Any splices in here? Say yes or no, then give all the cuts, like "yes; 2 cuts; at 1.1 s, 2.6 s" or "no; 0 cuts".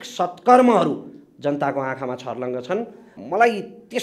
yes; 1 cut; at 3.1 s